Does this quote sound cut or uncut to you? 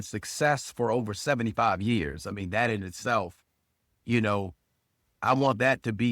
cut